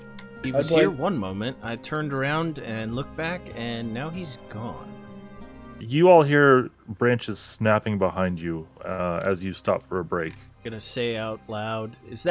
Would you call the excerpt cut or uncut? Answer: cut